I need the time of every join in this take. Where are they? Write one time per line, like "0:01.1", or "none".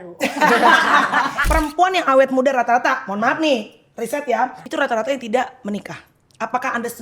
0:01.4
0:04.6